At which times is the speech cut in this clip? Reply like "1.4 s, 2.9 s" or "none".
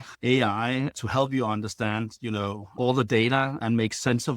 2.8 s, 3.6 s